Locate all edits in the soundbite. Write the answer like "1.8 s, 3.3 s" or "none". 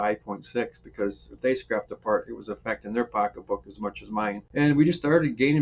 4.4 s